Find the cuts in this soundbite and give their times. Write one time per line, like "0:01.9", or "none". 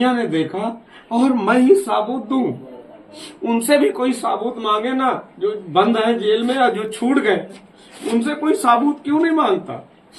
none